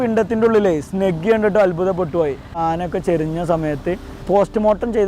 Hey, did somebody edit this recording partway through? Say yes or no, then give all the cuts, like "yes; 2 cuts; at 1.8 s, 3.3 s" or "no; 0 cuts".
yes; 1 cut; at 2.4 s